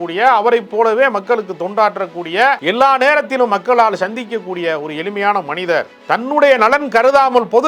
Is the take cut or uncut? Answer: cut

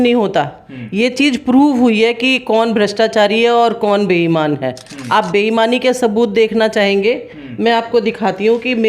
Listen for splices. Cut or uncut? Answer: uncut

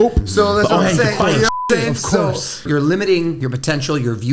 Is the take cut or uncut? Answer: cut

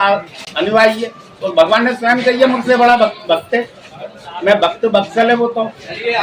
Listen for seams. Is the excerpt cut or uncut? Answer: uncut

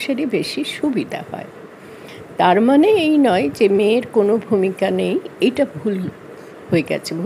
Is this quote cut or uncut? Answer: uncut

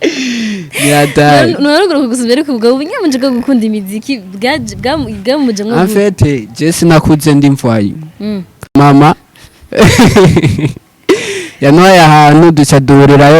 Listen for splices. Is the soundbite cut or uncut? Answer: cut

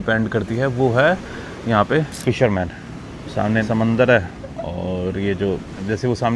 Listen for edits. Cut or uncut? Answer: uncut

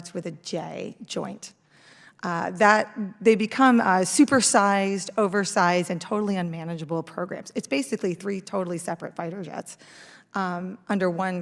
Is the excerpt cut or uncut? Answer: uncut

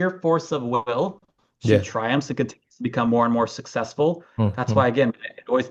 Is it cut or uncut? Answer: uncut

